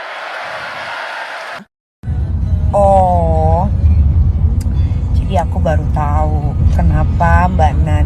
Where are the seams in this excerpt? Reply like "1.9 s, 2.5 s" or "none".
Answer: 1.7 s